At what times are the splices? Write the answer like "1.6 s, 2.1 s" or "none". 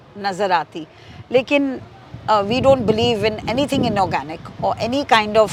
none